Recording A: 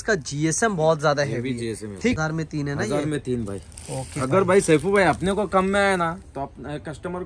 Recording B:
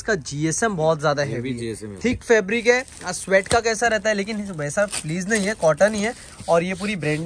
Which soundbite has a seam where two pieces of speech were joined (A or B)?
A